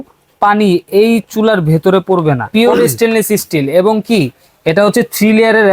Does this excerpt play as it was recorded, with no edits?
no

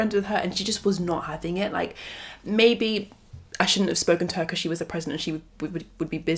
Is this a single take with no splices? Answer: yes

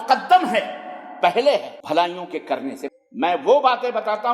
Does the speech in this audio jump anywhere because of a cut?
yes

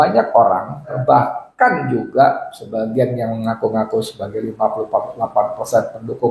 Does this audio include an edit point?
yes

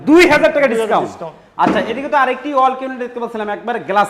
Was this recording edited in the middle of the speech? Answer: no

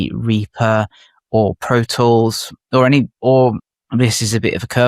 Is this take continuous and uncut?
no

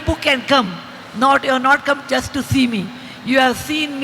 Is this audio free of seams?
yes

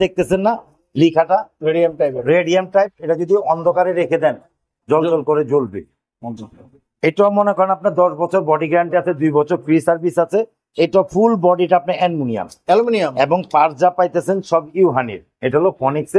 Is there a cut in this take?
no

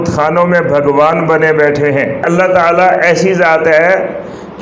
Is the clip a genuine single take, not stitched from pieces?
no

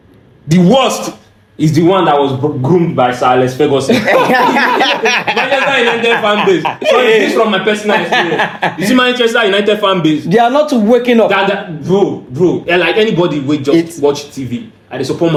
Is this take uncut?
yes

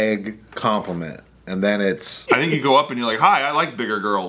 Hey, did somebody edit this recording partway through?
yes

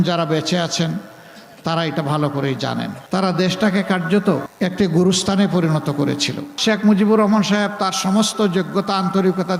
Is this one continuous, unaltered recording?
no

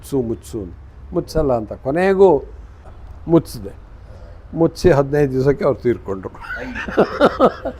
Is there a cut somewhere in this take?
yes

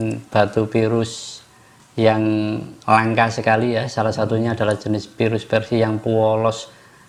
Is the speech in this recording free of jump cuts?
yes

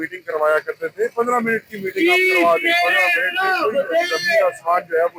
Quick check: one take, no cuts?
yes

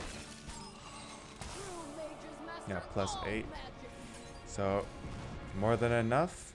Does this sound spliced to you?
no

